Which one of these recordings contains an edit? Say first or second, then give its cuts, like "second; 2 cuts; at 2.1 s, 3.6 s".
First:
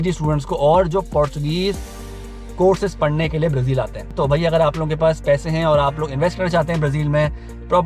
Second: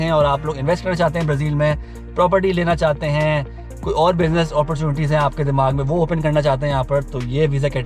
first; 1 cut; at 4.1 s